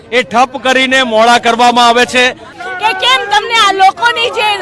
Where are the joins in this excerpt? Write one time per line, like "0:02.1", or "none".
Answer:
0:02.5